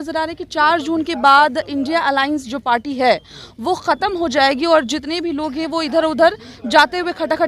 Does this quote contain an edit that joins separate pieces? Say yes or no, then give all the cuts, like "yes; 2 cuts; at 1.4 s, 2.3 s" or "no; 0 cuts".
no; 0 cuts